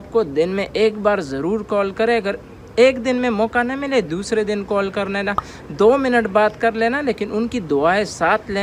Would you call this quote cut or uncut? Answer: uncut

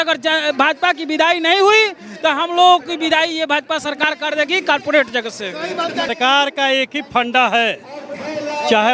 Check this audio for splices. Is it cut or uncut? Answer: cut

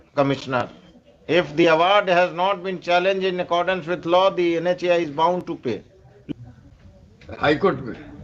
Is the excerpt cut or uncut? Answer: cut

